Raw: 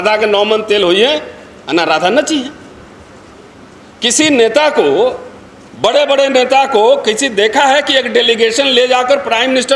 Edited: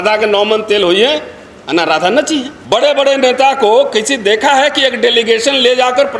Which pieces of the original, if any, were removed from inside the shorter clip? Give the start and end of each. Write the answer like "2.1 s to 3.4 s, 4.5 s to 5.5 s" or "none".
2.5 s to 5.7 s

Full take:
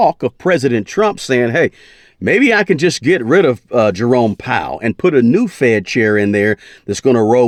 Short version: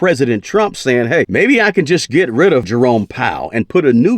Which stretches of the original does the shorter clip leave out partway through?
1.7 s to 2.2 s, 3.6 s to 4.0 s

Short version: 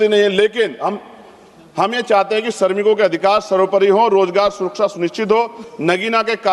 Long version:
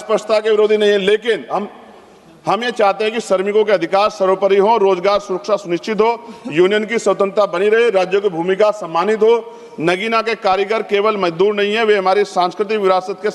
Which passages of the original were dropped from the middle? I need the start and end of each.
6.3 s to 9.6 s

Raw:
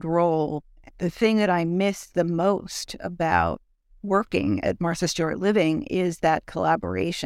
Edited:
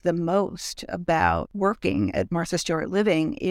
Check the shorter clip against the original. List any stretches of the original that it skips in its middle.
3.6 s to 4.0 s

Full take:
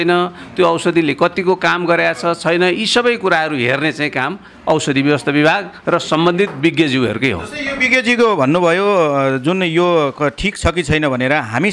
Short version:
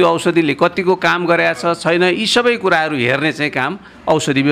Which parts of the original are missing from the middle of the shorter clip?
none

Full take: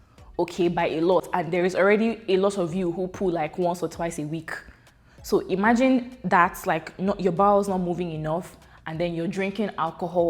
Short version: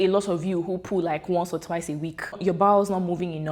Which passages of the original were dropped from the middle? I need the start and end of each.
4.7 s to 7.2 s

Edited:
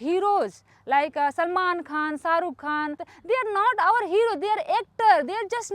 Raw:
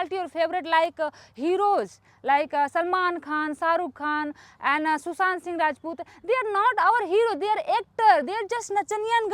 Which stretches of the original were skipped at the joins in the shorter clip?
4.5 s to 6.1 s

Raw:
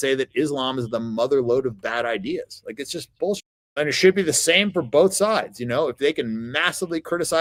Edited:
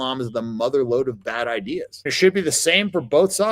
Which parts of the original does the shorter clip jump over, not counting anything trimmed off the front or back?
2.7 s to 3.9 s

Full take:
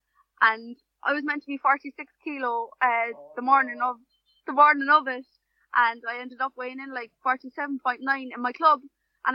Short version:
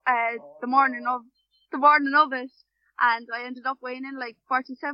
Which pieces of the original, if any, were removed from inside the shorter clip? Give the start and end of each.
none

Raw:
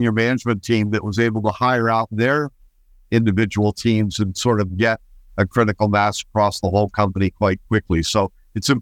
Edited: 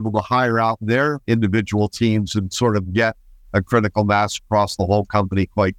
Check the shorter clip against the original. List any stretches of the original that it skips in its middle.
2.5 s to 3.0 s

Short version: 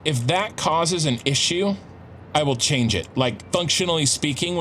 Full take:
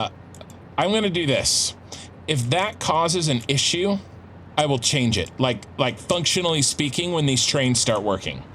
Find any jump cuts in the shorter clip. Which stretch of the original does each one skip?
5.7 s to 6.0 s

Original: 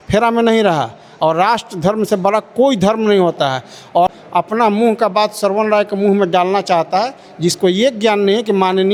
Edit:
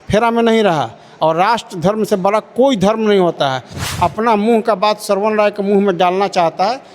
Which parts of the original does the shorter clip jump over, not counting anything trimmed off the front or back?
3.8 s to 4.2 s

